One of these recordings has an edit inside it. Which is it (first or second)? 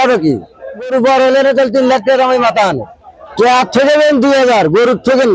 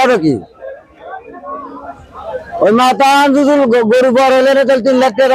first